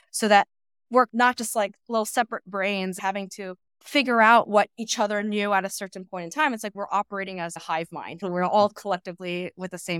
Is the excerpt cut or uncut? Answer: cut